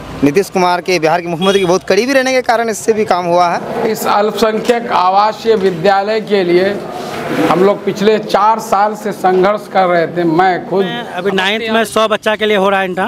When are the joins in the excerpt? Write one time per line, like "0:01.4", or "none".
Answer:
0:03.8
0:11.1